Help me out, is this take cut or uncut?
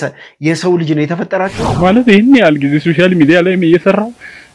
cut